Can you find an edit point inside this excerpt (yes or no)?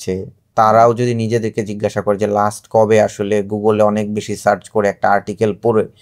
no